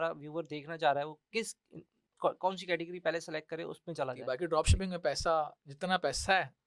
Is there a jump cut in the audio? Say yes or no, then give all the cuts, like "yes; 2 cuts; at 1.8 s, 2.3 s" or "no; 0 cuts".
yes; 1 cut; at 4.2 s